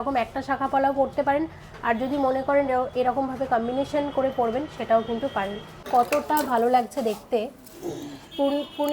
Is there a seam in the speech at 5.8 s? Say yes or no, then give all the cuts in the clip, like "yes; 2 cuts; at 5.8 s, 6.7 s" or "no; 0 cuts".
yes; 1 cut; at 5.8 s